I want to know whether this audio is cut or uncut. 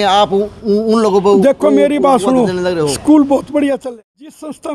cut